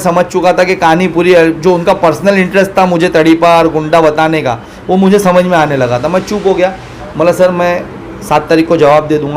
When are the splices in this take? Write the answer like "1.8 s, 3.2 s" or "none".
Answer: none